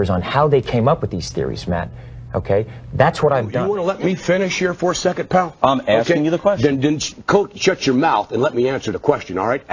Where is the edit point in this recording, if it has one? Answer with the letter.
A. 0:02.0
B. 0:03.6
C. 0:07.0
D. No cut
B